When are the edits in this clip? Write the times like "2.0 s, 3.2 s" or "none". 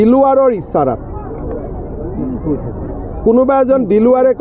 none